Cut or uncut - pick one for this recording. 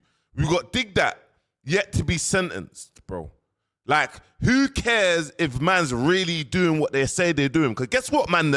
uncut